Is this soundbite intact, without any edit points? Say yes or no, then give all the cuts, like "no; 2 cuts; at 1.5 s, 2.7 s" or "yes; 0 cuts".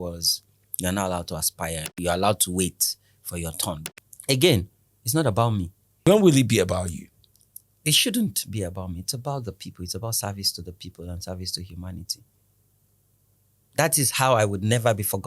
no; 3 cuts; at 2.0 s, 3.8 s, 5.8 s